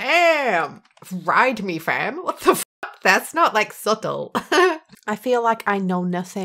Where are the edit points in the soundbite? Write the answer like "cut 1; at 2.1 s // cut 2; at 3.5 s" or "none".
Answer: cut 1; at 4.9 s